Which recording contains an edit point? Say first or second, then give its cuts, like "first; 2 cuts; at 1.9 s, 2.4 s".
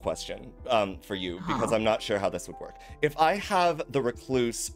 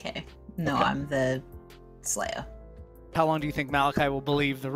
second; 1 cut; at 3.1 s